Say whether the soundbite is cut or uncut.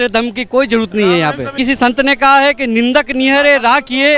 cut